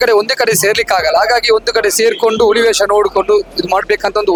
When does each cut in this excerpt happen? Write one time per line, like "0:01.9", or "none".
none

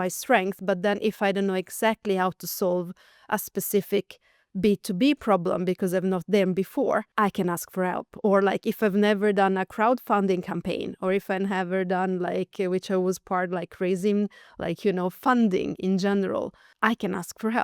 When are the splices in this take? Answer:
0:07.1
0:16.6

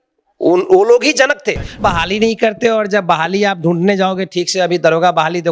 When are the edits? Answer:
0:01.8

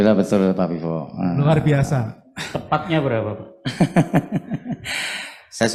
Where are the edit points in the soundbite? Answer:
none

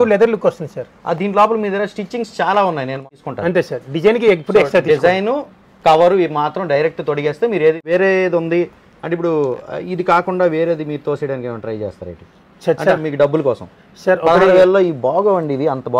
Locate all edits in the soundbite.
0:03.1
0:07.8

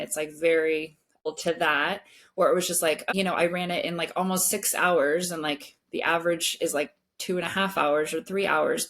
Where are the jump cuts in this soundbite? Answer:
0:01.2
0:03.1

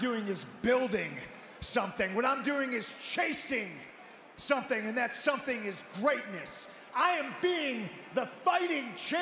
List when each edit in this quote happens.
none

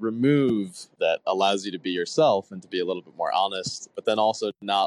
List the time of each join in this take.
0:00.9
0:03.9

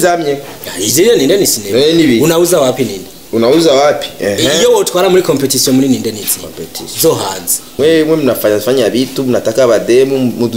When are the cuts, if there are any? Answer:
0:07.7

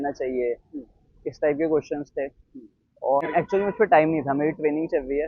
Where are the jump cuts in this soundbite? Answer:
0:03.2

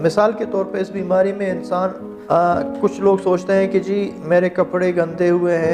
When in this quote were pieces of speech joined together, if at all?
0:02.1

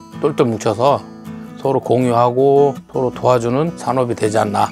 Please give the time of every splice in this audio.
0:02.8
0:03.8

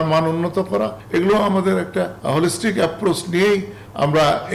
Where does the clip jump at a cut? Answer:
0:01.0
0:02.2

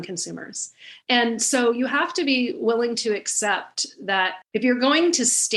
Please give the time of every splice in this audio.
0:00.9
0:04.4

